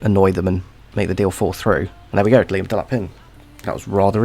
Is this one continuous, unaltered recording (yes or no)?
no